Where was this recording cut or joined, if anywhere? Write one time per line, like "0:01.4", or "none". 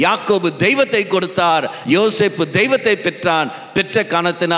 0:01.7